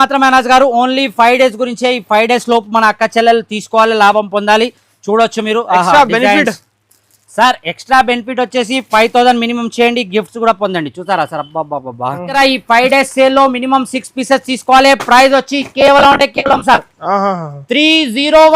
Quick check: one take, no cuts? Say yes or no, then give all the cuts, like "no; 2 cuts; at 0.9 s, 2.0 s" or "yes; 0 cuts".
no; 1 cut; at 12.3 s